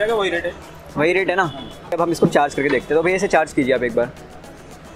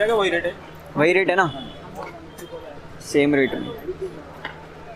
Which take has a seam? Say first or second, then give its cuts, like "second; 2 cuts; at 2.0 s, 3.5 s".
first; 1 cut; at 1.9 s